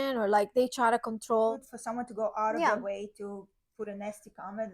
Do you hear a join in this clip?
yes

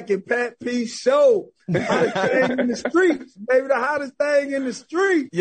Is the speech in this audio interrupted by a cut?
no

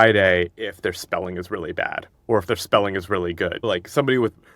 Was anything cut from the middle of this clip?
yes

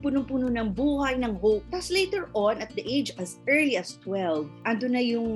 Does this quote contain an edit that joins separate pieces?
no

